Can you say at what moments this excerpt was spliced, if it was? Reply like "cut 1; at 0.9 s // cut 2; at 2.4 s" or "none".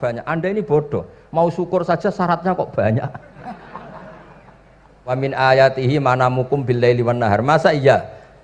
cut 1; at 5.2 s